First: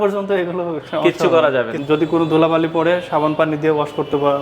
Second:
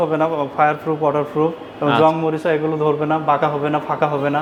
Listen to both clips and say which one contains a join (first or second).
first